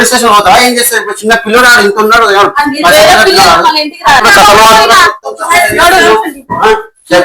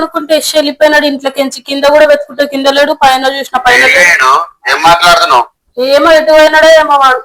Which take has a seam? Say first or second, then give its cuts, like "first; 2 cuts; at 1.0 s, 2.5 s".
first; 1 cut; at 4.2 s